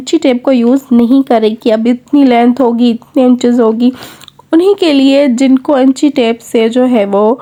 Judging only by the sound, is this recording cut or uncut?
uncut